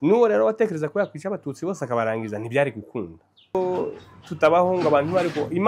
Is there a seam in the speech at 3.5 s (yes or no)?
yes